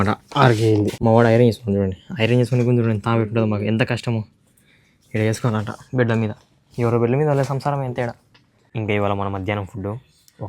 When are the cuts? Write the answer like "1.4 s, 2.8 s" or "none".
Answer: 0.9 s, 8.7 s